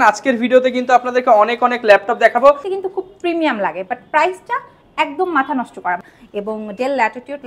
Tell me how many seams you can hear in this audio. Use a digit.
2